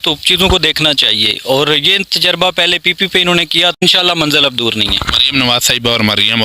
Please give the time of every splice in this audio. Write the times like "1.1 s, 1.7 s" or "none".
3.8 s